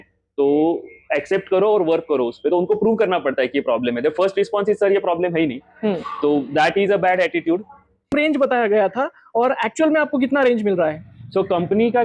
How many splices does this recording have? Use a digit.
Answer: 1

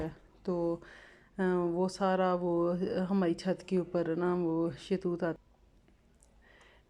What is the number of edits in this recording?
1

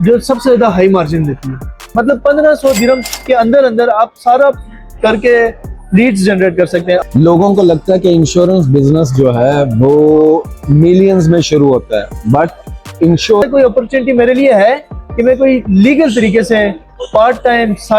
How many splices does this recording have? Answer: 3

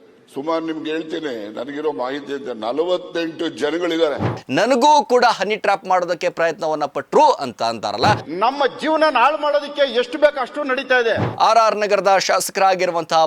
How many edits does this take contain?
3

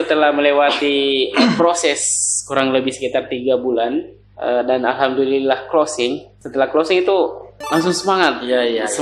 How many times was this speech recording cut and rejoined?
0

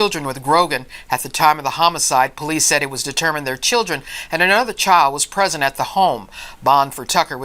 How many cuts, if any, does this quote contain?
2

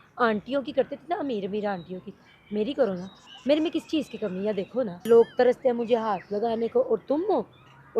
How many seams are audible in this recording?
1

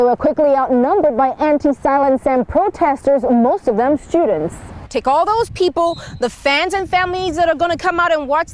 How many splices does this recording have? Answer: 1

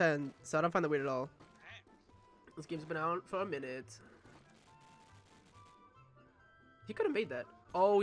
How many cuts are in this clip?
1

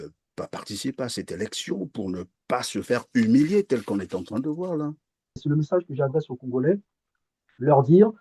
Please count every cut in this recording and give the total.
1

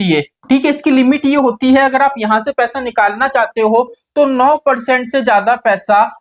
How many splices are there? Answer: 0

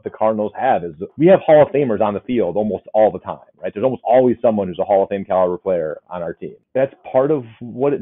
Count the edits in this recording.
2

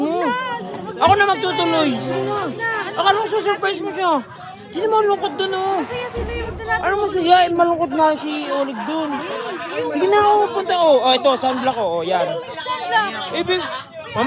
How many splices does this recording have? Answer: 0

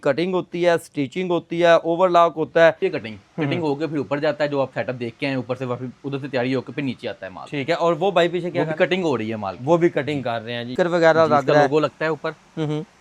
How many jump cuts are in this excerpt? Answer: 2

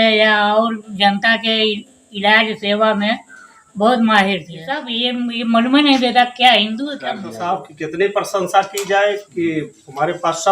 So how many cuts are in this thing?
2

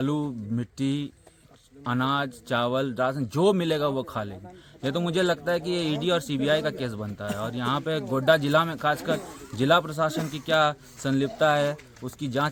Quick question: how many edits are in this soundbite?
0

